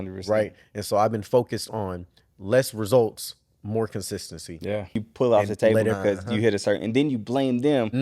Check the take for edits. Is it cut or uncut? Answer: cut